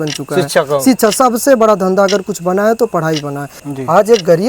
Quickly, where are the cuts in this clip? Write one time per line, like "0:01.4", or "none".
0:03.5